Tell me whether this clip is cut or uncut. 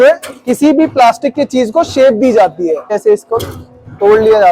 cut